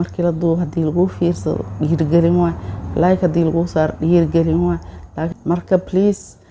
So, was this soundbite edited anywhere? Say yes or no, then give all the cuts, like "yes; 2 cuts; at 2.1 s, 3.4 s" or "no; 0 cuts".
yes; 1 cut; at 5.2 s